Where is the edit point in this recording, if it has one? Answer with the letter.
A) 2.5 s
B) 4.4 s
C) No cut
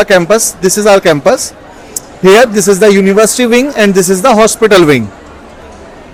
C